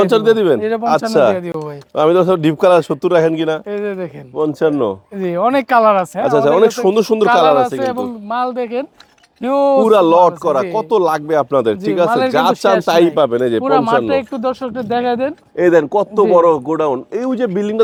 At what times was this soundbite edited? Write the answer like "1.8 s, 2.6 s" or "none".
none